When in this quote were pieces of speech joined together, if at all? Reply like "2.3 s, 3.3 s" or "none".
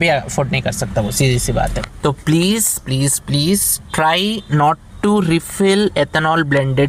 1.8 s